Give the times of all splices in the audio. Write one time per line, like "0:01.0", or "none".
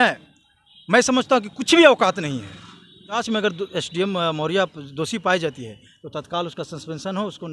0:03.2